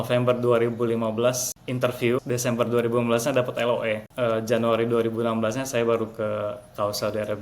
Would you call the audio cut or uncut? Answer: cut